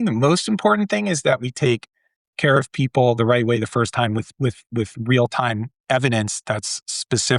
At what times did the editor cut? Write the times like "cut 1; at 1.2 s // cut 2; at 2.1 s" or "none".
none